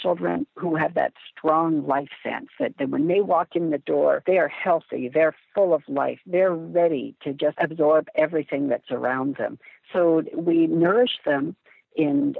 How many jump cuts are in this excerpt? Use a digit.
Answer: 2